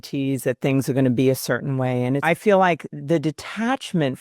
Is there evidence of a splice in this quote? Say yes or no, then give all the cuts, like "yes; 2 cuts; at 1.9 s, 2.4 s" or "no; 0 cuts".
yes; 2 cuts; at 2.2 s, 2.9 s